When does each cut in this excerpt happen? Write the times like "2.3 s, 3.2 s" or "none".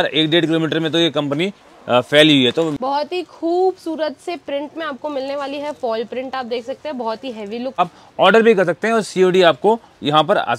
2.7 s, 7.8 s